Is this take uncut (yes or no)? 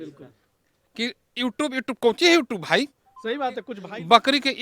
no